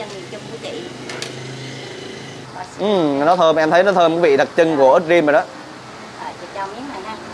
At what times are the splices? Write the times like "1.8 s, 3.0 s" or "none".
2.4 s